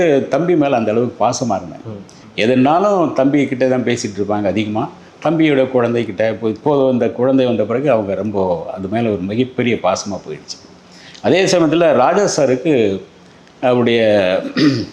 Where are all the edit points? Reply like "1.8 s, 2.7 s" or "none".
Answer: none